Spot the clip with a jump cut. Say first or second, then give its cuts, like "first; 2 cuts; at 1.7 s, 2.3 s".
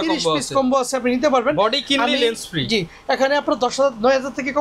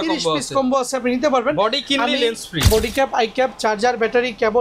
second; 1 cut; at 2.7 s